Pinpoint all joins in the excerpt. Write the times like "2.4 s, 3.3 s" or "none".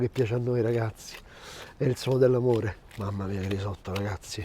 2.8 s